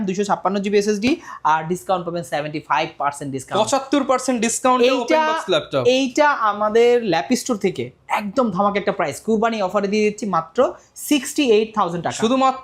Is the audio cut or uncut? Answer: uncut